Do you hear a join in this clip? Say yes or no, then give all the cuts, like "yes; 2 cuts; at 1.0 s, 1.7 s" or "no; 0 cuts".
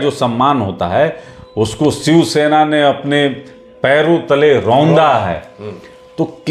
no; 0 cuts